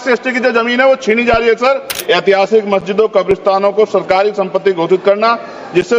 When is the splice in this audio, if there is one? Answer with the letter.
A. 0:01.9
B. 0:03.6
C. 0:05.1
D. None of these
A